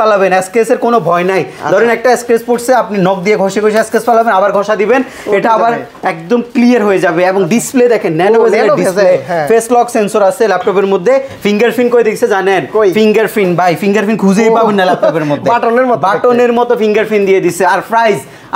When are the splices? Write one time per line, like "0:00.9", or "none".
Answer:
none